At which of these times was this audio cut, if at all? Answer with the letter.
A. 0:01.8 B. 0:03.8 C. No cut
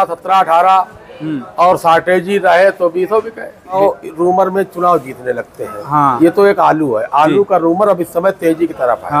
B